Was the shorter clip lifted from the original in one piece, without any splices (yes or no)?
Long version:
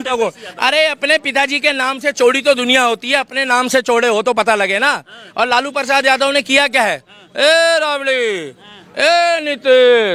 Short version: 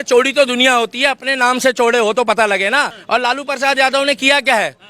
no